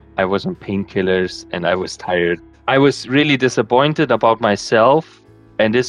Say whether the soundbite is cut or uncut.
uncut